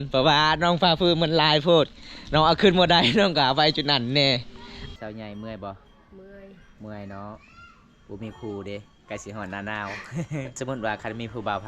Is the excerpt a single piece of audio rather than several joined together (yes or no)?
no